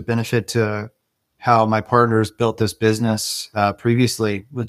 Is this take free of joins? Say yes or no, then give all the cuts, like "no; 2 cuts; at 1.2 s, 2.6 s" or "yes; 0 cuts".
yes; 0 cuts